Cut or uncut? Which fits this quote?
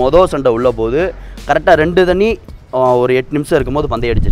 uncut